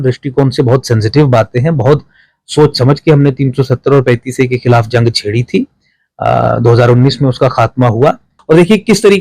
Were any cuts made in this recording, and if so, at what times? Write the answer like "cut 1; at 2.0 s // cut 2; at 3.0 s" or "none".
cut 1; at 8.3 s